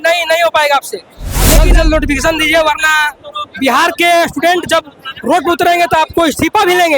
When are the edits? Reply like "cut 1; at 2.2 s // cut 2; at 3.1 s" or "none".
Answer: cut 1; at 1.6 s